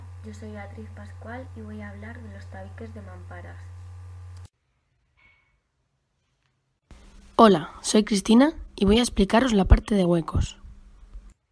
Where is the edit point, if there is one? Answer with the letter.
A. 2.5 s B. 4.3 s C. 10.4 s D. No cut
A